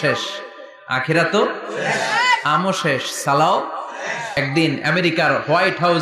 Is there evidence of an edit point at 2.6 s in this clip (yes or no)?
no